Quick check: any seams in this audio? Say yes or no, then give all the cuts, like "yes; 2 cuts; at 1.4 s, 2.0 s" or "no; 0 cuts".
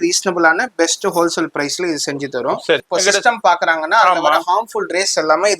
yes; 1 cut; at 2.8 s